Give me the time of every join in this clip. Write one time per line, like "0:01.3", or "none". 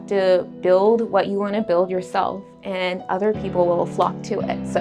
none

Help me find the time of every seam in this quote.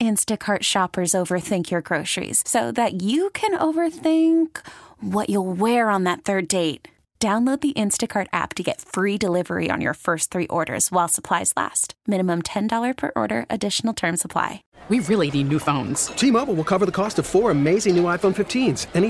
0:14.7

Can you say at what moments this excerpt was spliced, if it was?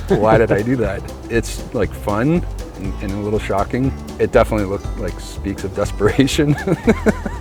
0:01.2
0:04.0

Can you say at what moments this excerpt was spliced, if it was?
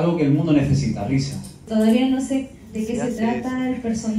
0:01.7

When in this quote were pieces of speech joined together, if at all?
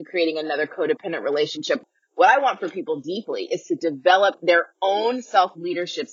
0:01.8

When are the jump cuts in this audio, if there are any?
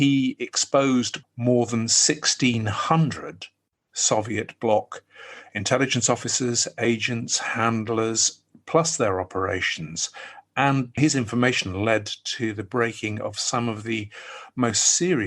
0:01.2
0:11.0

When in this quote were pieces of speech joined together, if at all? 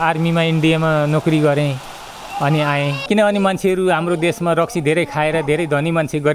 0:03.0

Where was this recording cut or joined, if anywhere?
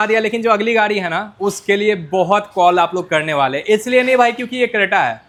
none

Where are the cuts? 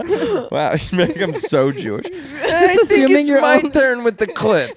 none

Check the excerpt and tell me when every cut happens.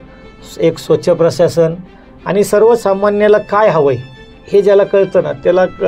none

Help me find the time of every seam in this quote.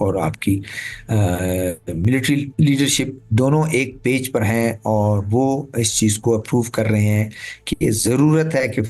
0:02.5
0:03.2

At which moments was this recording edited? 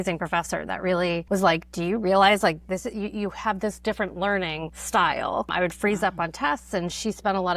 0:01.2
0:04.7
0:05.5

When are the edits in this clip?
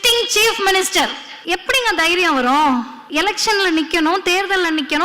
0:01.3
0:03.0

